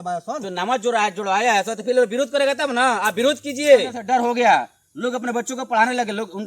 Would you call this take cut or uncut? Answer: cut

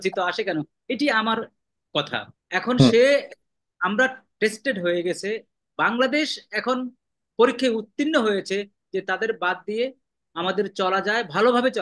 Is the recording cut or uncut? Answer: cut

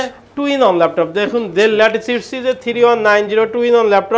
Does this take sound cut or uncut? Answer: uncut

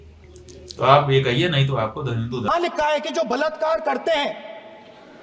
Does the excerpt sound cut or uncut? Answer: cut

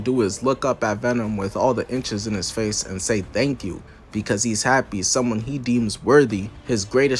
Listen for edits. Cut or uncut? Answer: uncut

